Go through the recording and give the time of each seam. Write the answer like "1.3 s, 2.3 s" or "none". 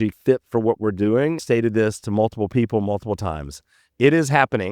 1.4 s

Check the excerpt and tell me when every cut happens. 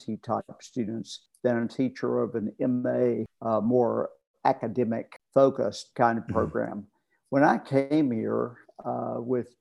1.2 s, 3.3 s, 5.1 s

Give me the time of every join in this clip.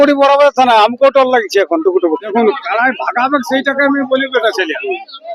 2.3 s

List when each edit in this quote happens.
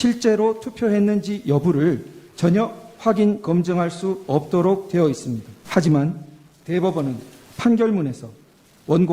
5.5 s

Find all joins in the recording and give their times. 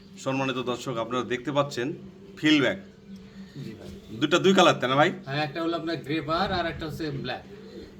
none

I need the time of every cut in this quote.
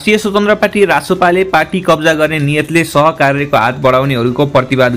none

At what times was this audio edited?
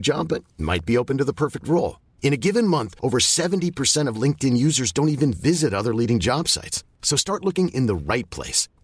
none

